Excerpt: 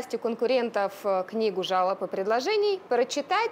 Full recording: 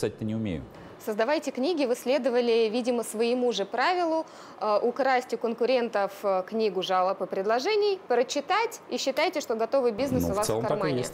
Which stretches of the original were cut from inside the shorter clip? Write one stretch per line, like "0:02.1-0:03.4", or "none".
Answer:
none